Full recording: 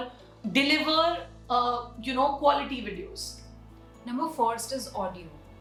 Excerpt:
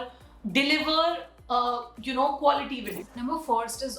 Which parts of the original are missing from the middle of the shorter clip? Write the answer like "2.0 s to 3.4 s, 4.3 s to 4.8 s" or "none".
3.0 s to 3.9 s